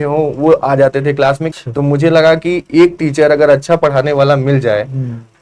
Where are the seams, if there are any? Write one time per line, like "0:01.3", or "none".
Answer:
0:01.5